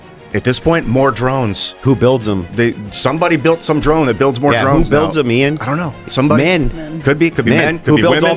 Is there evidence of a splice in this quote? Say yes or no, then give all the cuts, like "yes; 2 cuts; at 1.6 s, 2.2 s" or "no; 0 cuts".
no; 0 cuts